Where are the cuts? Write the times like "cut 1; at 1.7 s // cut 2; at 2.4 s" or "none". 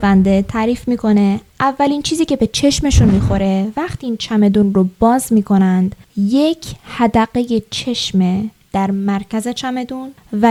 none